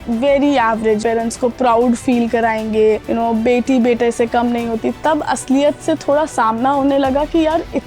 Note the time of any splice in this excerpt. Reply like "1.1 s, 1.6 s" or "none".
1.0 s, 3.0 s